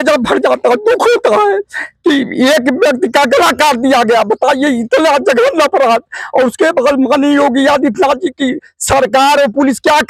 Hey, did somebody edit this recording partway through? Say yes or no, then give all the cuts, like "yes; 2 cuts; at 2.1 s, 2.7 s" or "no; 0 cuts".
no; 0 cuts